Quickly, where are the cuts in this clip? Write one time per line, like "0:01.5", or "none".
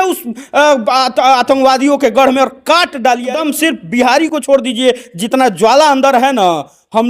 0:03.4